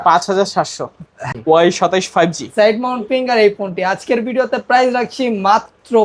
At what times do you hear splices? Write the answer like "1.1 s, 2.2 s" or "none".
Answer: 1.2 s

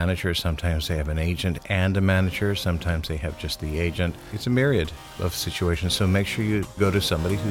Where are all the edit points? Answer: 4.3 s, 5.0 s, 6.8 s

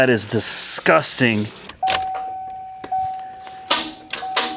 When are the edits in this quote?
1.6 s

